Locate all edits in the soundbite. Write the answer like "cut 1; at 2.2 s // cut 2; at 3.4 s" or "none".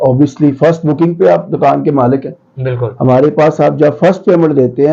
none